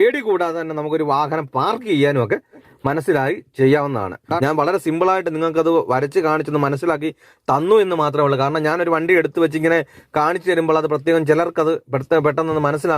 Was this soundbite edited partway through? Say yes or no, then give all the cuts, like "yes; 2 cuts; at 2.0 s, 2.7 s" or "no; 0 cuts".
yes; 2 cuts; at 2.5 s, 4.4 s